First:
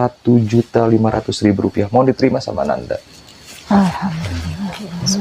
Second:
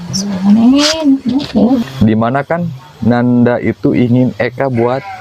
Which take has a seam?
second; 1 cut; at 1.5 s

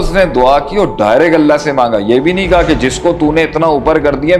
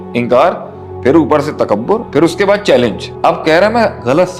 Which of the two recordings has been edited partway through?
second; 1 cut; at 3.0 s

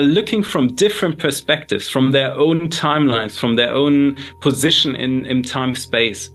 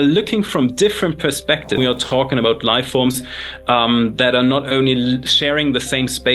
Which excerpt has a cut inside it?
second; 1 cut; at 1.8 s

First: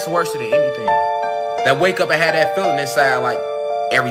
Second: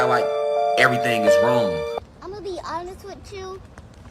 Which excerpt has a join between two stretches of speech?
second; 1 cut; at 1.9 s

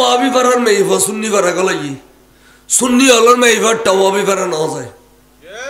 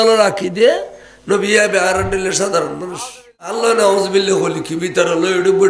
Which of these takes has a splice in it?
second; 1 cut; at 3.6 s

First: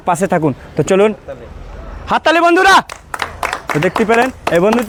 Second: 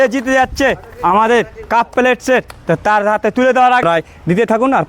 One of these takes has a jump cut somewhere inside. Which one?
second; 1 cut; at 3.8 s

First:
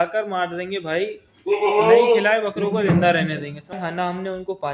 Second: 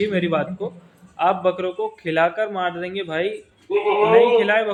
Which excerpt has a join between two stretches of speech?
first; 1 cut; at 3.7 s

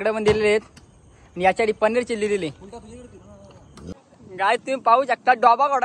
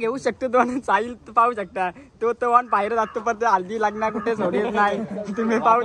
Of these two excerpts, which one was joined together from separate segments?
first; 1 cut; at 3.9 s

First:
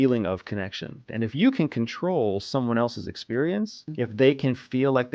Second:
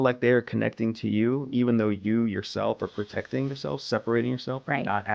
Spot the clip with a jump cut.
first; 2 cuts; at 1.0 s, 3.8 s

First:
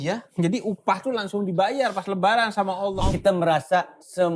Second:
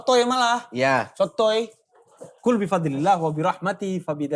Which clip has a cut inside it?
first; 1 cut; at 2.9 s

